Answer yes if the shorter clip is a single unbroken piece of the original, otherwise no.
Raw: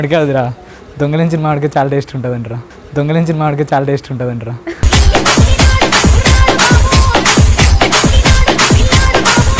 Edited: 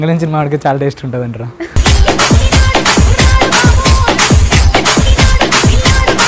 no